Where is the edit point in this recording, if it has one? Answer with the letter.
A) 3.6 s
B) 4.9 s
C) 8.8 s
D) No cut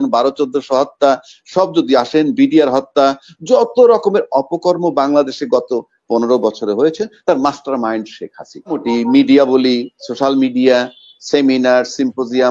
C